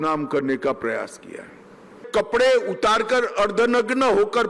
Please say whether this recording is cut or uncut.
cut